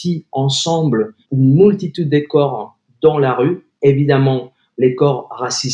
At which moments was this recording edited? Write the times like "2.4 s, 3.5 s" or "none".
1.2 s

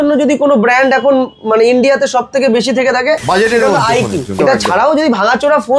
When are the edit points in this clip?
4.3 s

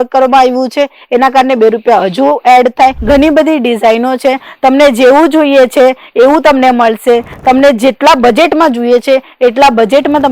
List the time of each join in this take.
3.0 s

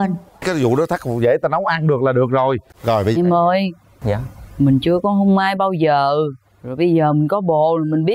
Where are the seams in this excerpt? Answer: 3.1 s

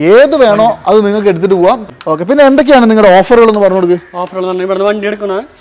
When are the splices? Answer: 1.9 s

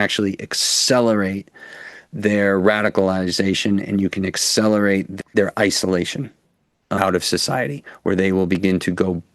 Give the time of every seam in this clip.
5.1 s, 7.0 s

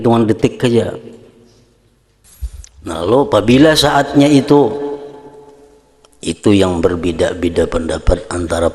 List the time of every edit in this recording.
2.2 s

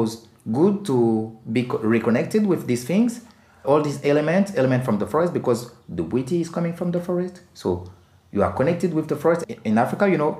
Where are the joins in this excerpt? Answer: 9.4 s

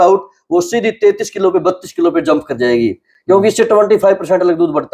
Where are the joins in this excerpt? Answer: none

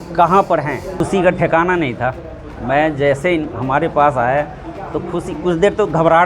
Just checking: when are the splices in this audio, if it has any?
1.0 s

